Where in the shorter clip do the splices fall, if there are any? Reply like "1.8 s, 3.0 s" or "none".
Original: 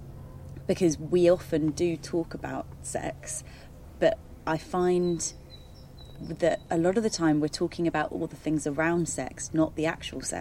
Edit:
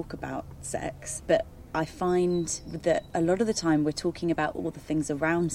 1.1 s, 2.6 s